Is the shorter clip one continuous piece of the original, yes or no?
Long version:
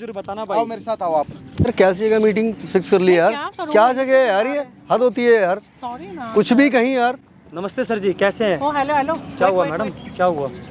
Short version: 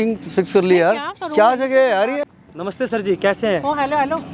no